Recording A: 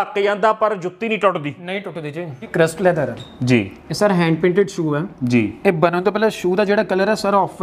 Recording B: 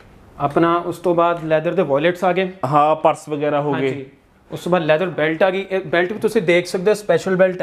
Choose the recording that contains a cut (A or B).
A